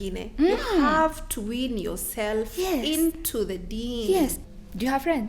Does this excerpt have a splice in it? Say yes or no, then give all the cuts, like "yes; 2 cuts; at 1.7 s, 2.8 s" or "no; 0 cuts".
yes; 1 cut; at 4.4 s